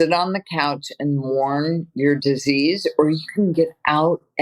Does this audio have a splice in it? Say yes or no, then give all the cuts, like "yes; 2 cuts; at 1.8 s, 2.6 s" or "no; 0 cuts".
no; 0 cuts